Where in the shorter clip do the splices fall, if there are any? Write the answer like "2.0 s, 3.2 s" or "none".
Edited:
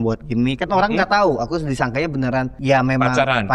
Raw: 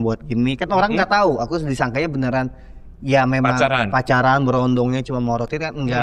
2.5 s